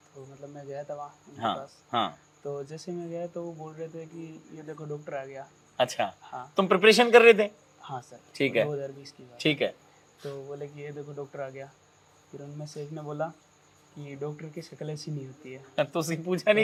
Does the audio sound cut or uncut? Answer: uncut